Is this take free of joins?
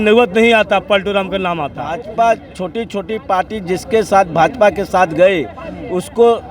no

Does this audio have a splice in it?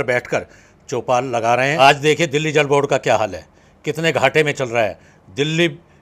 yes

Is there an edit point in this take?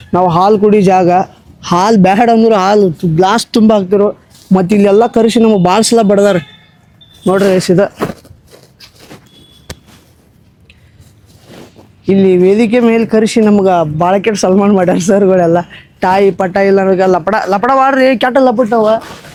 no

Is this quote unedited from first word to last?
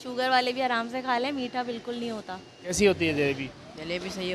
no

